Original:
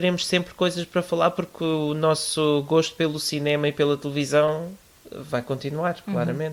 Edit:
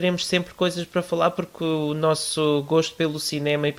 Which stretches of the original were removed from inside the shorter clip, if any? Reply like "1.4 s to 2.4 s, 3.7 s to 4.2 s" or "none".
none